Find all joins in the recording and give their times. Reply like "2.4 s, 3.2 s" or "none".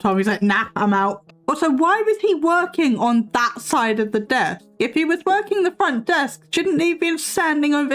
none